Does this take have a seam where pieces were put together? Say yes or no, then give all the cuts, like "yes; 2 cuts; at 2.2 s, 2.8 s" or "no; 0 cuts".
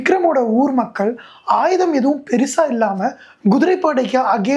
no; 0 cuts